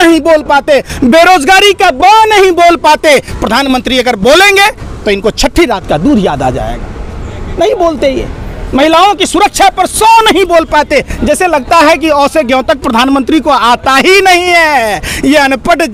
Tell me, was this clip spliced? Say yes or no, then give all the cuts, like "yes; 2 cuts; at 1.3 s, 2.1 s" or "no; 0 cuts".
no; 0 cuts